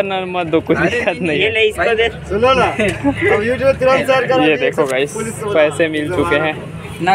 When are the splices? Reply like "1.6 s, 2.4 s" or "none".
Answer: none